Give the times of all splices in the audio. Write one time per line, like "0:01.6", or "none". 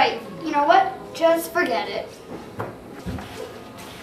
0:02.8